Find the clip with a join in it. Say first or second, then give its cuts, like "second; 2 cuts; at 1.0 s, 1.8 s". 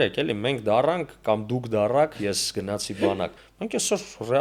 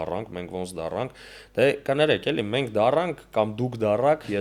first; 1 cut; at 3.5 s